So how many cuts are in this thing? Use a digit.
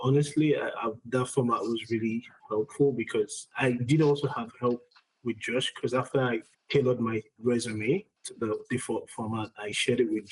2